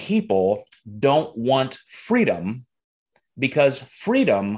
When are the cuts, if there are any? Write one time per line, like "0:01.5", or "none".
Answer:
none